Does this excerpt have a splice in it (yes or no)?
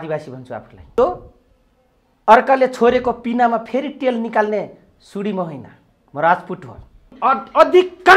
yes